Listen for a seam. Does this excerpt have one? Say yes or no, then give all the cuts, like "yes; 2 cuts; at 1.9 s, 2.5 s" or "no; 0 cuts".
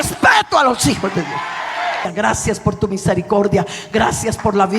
yes; 1 cut; at 2.1 s